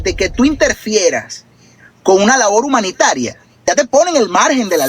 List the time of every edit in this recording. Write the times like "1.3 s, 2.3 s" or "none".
3.6 s